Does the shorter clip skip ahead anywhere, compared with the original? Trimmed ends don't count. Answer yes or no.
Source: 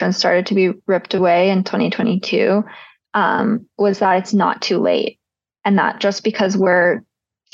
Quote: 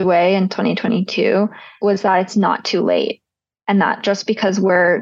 yes